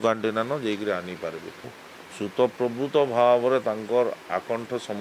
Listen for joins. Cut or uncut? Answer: cut